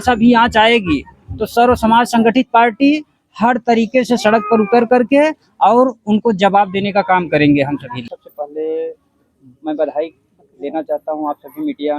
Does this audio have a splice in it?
yes; 1 cut; at 8.2 s

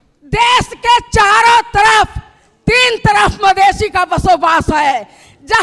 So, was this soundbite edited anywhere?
no; 0 cuts

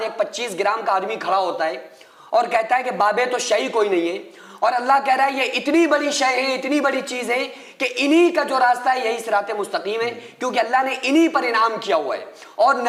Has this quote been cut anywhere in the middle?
no; 0 cuts

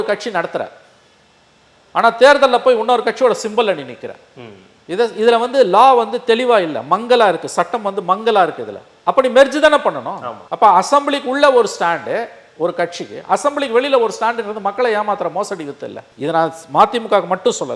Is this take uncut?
yes; 0 cuts

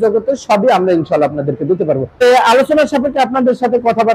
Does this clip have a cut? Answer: yes; 1 cut; at 2.2 s

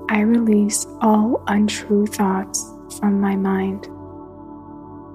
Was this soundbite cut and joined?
no; 0 cuts

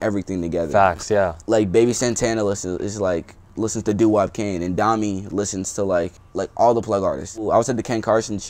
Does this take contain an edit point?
yes; 3 cuts; at 1.4 s, 6.2 s, 7.4 s

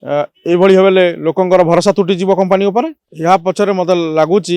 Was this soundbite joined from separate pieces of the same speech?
yes; 1 cut; at 3.0 s

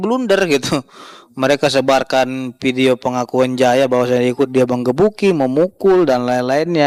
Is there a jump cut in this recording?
no; 0 cuts

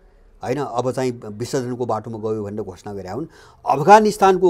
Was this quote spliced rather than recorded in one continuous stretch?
no; 0 cuts

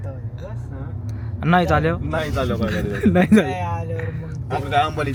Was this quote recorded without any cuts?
yes; 0 cuts

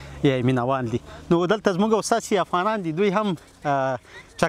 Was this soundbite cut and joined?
no; 0 cuts

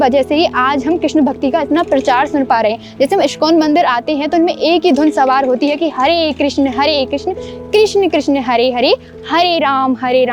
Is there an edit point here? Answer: no; 0 cuts

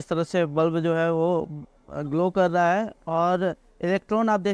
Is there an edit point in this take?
no; 0 cuts

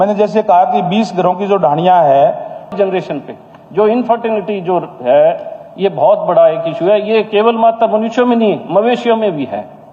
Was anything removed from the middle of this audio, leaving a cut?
yes; 1 cut; at 2.7 s

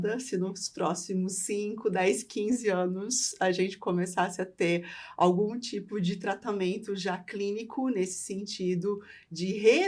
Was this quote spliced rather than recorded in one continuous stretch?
no; 0 cuts

